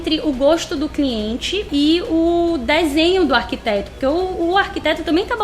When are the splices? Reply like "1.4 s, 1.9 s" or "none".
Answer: 1.7 s